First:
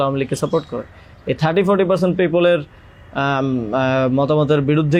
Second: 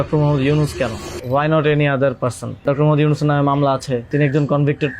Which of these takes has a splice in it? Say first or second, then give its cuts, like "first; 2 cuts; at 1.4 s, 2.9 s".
second; 3 cuts; at 1.1 s, 2.6 s, 4.1 s